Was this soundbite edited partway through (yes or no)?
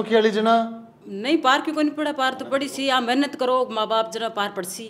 no